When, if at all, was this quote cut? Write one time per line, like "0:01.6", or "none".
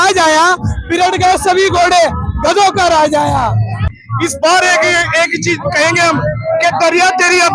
0:03.9